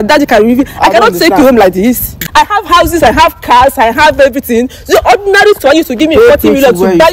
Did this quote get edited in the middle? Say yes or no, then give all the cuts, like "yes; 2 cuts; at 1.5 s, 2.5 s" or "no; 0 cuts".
yes; 1 cut; at 2.2 s